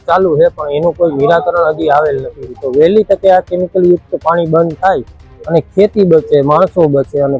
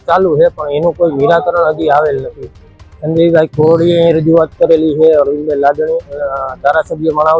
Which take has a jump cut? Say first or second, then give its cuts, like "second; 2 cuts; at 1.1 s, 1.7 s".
first; 1 cut; at 2.5 s